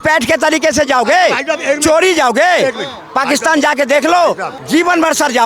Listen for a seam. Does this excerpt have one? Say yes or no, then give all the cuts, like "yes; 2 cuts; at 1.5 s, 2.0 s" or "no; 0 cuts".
yes; 1 cut; at 4.5 s